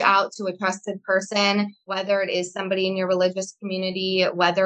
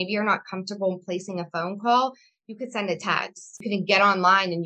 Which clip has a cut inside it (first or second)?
first